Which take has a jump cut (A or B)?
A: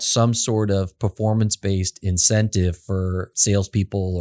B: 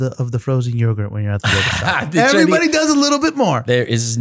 A